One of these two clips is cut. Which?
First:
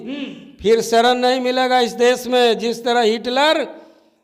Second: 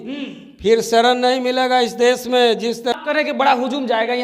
second; 1 cut; at 2.9 s

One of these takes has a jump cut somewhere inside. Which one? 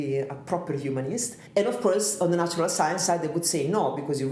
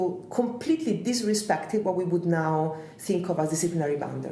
first; 1 cut; at 1.4 s

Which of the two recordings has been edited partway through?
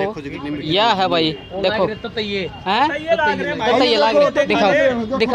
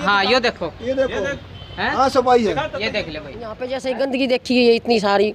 second; 1 cut; at 3.7 s

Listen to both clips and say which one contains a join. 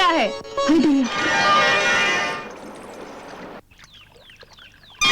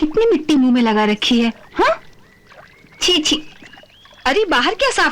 first; 1 cut; at 2.2 s

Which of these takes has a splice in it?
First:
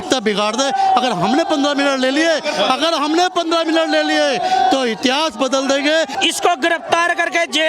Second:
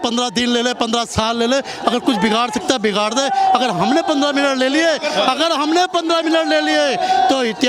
first; 1 cut; at 6.1 s

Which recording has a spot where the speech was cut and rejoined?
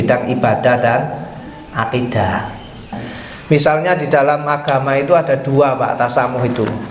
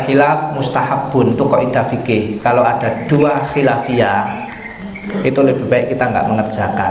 first; 1 cut; at 3.0 s

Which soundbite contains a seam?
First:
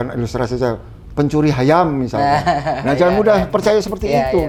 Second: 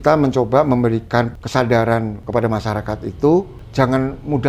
second; 3 cuts; at 1.4 s, 2.2 s, 3.6 s

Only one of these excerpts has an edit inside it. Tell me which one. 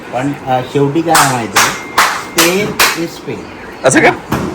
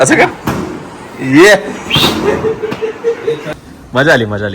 second; 1 cut; at 3.4 s

